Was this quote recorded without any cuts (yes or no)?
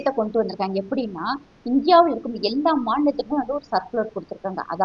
yes